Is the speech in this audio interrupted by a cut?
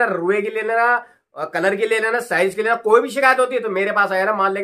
no; 0 cuts

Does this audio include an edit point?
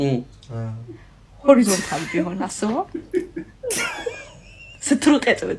no; 0 cuts

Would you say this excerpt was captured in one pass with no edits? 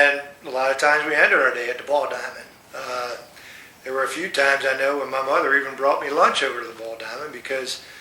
no; 1 cut; at 2.1 s

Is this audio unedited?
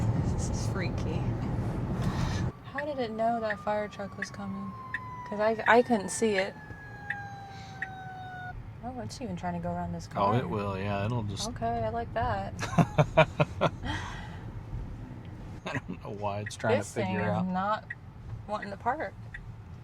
no; 3 cuts; at 2.4 s, 8.5 s, 15.5 s

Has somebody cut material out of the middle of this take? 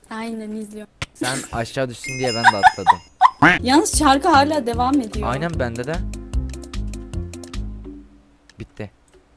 yes; 2 cuts; at 1.0 s, 3.5 s

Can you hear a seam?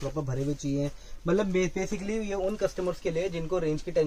no; 0 cuts

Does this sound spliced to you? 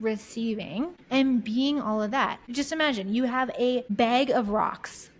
yes; 3 cuts; at 1.0 s, 2.5 s, 3.9 s

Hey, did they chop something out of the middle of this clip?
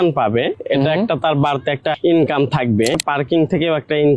yes; 2 cuts; at 2.0 s, 2.9 s

